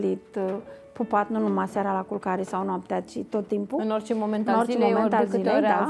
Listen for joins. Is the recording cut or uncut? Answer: uncut